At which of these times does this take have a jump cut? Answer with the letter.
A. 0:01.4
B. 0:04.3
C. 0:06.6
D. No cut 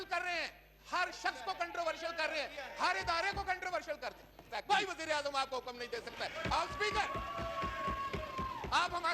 B